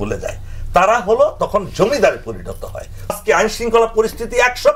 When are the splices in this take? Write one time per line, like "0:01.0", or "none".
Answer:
0:03.2